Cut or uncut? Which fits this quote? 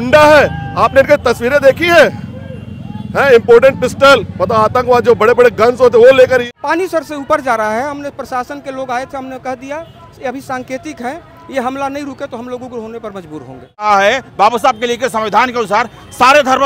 cut